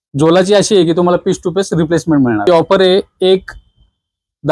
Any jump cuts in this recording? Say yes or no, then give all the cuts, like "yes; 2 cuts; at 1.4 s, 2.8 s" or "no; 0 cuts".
yes; 1 cut; at 2.5 s